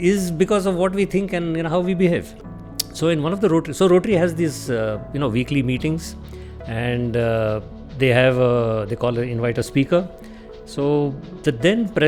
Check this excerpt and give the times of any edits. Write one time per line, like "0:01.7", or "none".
none